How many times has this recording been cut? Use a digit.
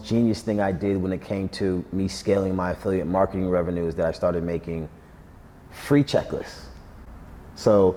0